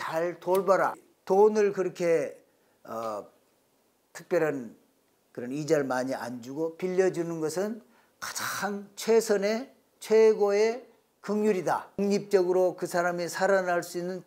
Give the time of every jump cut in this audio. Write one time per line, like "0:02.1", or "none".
0:01.1
0:12.0